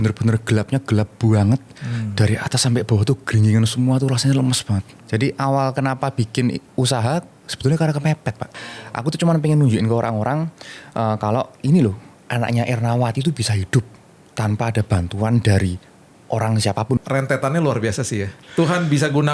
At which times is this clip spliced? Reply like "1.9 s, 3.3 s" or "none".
4.9 s, 8.8 s, 17.0 s, 18.4 s